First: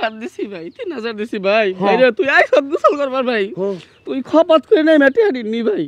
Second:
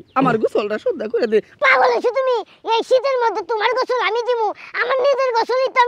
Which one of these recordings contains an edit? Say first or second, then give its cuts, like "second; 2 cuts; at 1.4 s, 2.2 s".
second; 1 cut; at 1.6 s